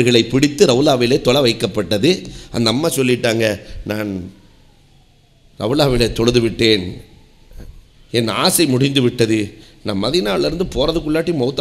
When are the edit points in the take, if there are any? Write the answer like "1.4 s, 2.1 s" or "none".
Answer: none